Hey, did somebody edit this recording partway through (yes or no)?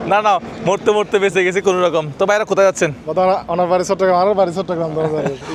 no